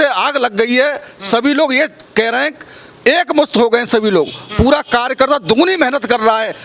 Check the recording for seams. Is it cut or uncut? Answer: uncut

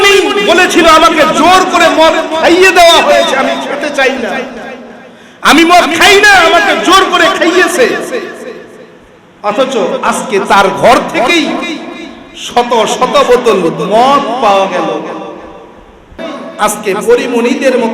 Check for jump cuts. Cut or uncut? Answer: cut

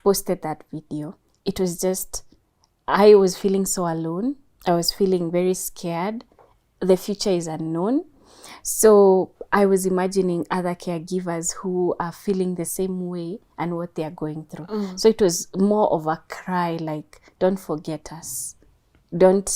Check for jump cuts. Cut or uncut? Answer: uncut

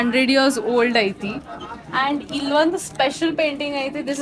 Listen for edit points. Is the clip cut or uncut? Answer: uncut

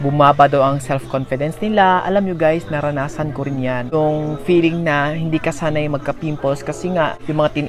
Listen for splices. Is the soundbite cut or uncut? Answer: uncut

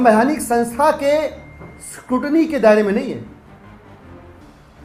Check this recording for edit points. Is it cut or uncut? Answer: uncut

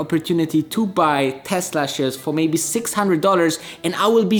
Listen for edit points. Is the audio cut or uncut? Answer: uncut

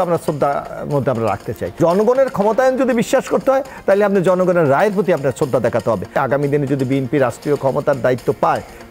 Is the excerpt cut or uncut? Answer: cut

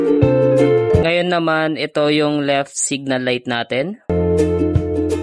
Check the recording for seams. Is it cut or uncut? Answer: cut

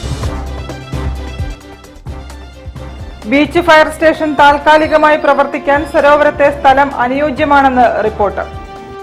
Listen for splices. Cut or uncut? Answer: cut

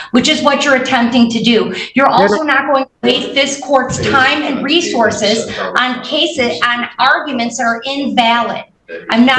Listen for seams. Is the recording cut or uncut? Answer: uncut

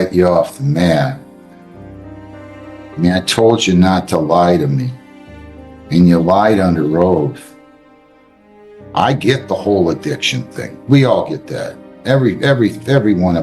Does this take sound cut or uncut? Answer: cut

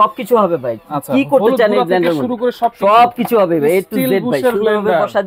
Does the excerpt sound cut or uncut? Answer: uncut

